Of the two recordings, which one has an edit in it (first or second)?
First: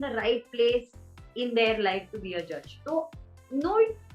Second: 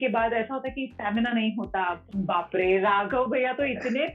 second